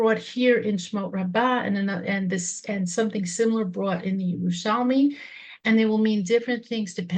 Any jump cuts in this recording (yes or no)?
no